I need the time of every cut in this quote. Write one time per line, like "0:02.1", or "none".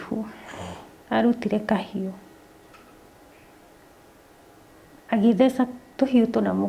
none